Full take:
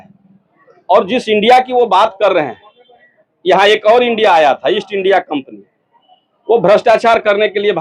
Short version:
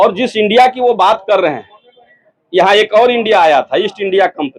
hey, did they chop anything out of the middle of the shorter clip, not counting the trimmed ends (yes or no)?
no